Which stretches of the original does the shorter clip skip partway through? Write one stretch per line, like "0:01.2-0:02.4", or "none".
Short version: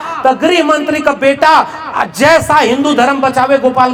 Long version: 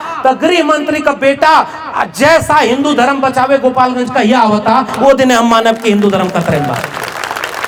none